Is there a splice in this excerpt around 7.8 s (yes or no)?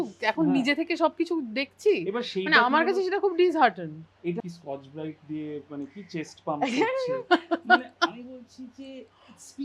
no